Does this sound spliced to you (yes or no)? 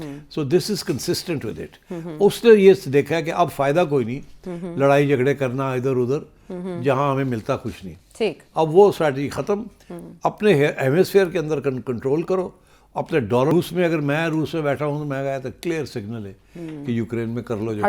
yes